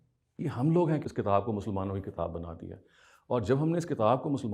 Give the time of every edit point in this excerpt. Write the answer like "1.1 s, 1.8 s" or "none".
1.1 s

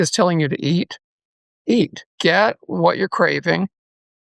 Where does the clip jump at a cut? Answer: 2.0 s

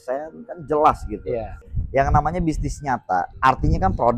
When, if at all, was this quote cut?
1.6 s, 3.3 s

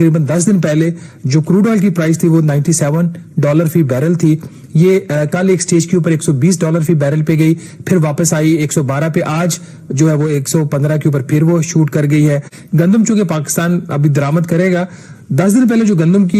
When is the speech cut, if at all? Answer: 12.6 s

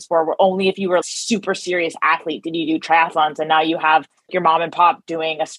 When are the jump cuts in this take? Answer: 1.0 s, 4.3 s

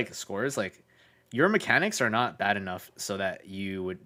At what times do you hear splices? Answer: none

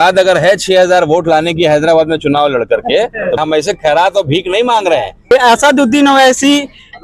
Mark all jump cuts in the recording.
3.4 s, 5.3 s

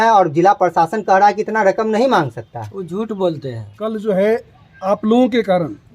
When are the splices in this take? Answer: 3.7 s

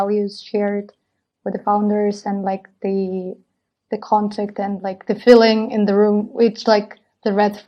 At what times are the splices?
none

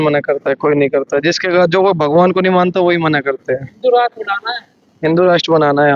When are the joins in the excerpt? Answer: none

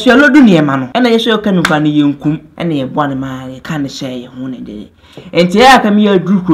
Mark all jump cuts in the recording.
0.9 s, 2.5 s, 3.5 s

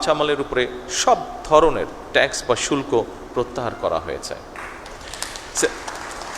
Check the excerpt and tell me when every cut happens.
none

